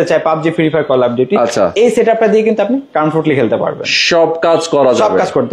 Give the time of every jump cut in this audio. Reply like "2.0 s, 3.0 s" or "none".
none